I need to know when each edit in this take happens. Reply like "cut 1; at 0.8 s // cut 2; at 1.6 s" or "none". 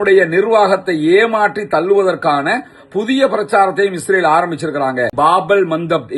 cut 1; at 5.1 s